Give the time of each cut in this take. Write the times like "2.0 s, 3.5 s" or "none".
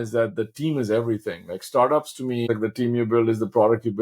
2.5 s